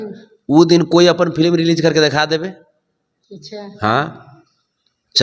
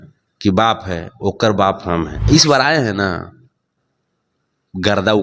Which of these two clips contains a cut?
second; 1 cut; at 2.2 s

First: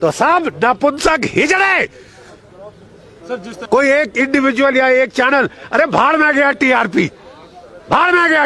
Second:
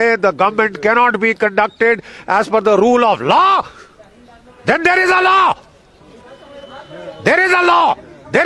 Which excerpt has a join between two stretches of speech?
first; 1 cut; at 3.5 s

